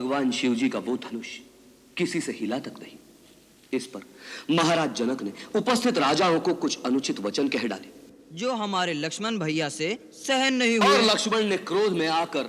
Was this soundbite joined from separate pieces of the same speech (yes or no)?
no